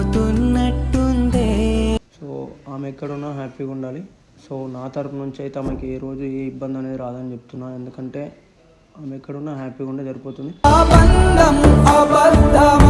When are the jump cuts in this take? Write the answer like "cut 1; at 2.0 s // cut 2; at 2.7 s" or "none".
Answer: cut 1; at 2.1 s